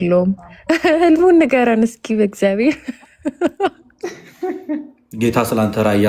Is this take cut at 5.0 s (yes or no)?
yes